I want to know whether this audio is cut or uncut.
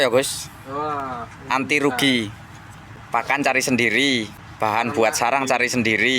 cut